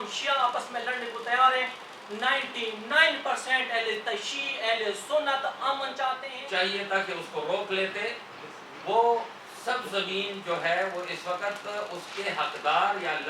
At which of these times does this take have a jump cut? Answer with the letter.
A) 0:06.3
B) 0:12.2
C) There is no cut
A